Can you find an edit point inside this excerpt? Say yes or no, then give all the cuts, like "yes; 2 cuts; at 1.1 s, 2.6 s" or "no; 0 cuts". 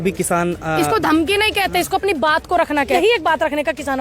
yes; 1 cut; at 3.0 s